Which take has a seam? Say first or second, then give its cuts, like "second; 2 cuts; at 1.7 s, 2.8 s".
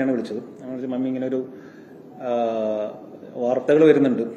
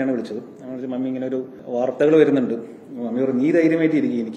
second; 1 cut; at 1.6 s